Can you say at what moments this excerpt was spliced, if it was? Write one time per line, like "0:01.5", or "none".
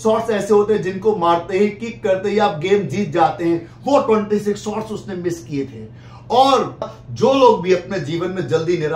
0:06.9